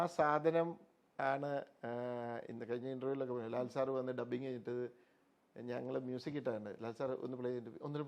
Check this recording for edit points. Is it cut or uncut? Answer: uncut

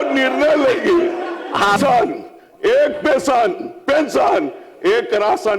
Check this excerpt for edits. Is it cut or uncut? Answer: cut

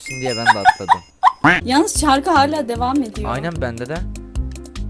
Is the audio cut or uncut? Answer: cut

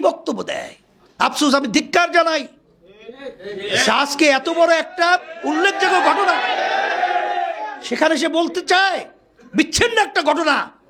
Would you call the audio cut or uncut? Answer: uncut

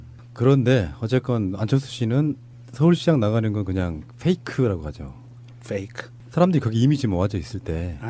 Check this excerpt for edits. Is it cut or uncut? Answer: uncut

